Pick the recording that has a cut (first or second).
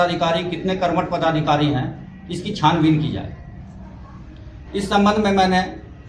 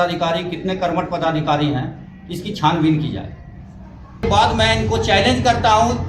second